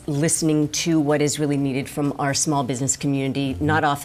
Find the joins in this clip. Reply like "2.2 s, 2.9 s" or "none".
none